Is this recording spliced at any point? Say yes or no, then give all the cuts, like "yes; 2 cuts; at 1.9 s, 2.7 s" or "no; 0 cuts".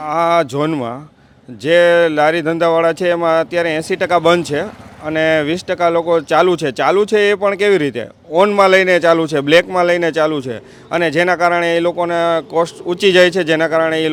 no; 0 cuts